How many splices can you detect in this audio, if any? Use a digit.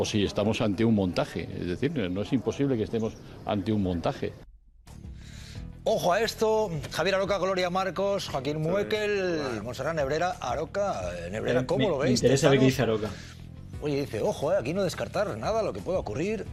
0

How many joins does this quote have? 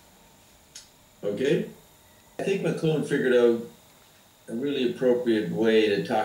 1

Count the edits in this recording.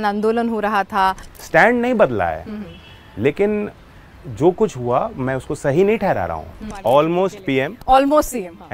2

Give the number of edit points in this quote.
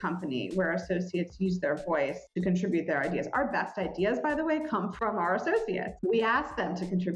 1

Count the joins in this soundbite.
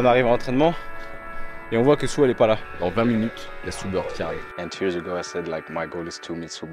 2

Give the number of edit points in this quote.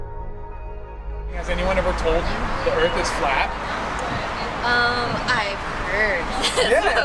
1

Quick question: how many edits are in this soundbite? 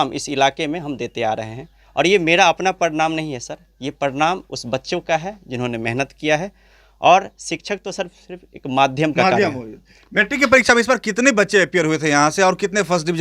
0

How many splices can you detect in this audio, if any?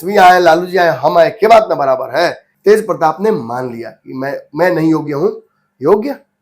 1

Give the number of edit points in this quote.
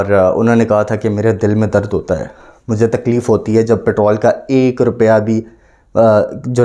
0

